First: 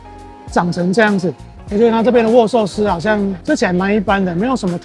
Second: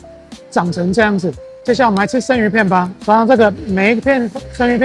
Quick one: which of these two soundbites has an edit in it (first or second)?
first